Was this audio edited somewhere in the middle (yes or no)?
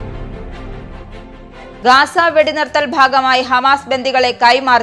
yes